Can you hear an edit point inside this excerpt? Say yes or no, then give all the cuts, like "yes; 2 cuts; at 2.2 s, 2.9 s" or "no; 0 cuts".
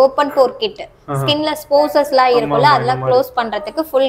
no; 0 cuts